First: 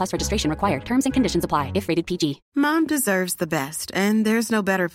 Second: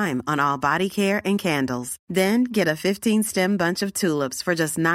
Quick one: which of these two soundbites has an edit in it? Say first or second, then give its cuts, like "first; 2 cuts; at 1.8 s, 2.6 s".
first; 1 cut; at 2.4 s